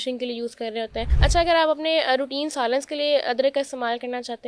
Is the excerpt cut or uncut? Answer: cut